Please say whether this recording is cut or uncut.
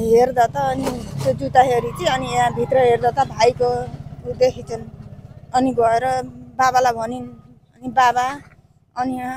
uncut